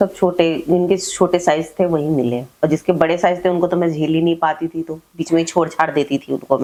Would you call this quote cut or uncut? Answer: uncut